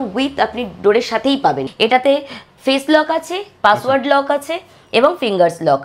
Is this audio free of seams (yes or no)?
no